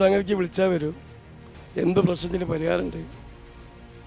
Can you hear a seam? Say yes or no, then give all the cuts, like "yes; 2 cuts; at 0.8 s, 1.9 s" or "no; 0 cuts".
no; 0 cuts